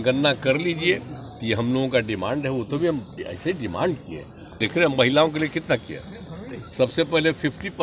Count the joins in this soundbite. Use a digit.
1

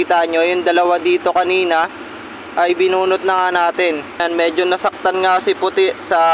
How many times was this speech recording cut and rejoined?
1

